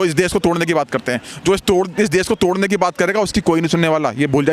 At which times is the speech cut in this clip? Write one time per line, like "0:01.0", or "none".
none